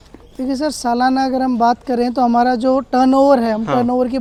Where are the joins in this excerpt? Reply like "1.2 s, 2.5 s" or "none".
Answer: none